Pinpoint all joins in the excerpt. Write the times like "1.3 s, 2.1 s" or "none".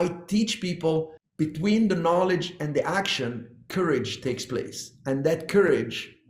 1.2 s